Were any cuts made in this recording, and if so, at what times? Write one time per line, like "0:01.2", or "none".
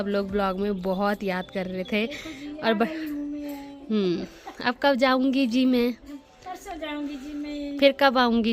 none